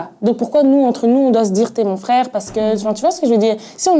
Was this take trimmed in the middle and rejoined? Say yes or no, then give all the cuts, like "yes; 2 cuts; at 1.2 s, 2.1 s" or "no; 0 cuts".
yes; 1 cut; at 2.2 s